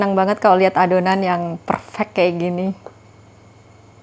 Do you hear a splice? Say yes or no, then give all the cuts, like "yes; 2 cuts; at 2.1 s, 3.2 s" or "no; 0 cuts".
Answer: no; 0 cuts